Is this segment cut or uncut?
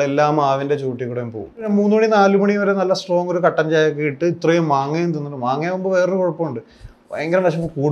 cut